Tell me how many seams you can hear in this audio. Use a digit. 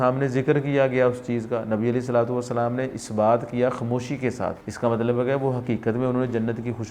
1